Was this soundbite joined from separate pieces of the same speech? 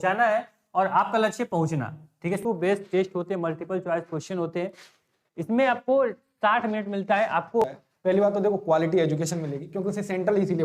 yes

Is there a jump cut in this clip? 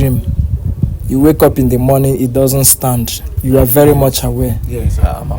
no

